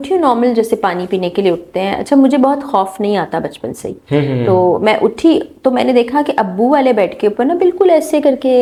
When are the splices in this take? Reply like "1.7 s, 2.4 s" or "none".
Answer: none